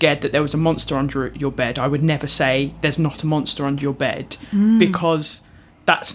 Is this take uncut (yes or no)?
yes